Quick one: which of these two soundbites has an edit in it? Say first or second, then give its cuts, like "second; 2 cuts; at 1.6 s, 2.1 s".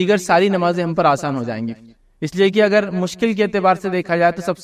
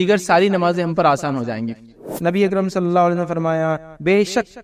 second; 1 cut; at 2.1 s